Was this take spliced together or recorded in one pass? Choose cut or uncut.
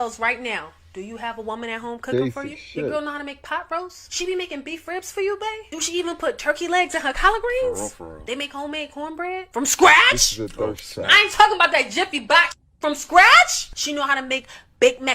cut